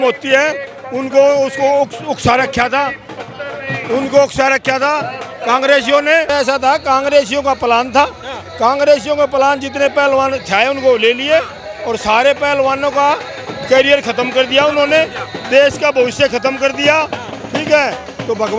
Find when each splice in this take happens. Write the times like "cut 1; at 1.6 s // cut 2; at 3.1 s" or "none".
cut 1; at 6.3 s